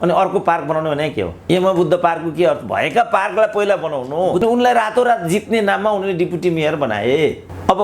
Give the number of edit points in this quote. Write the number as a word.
two